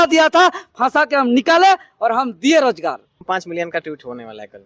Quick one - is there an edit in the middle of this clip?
yes; 1 cut; at 3.2 s

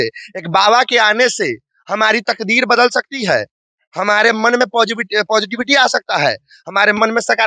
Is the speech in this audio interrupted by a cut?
no; 0 cuts

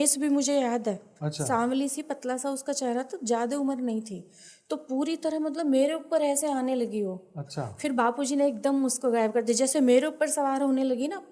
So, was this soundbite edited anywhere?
no; 0 cuts

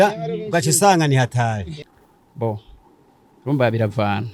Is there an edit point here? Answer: no; 0 cuts

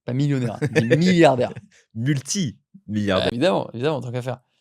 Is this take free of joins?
no; 1 cut; at 3.3 s

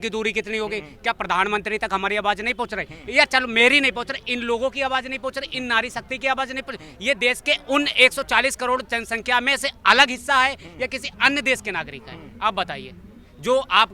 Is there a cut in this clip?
no; 0 cuts

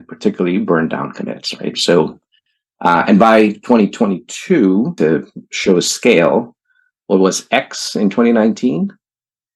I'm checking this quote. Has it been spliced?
yes; 1 cut; at 4.9 s

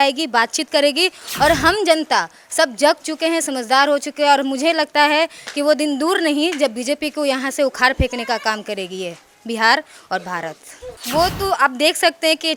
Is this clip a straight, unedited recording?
yes; 0 cuts

